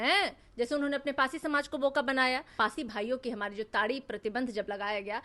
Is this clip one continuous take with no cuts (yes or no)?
no